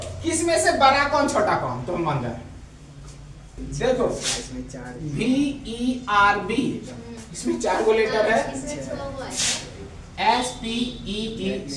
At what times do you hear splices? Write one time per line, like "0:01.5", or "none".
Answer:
0:03.6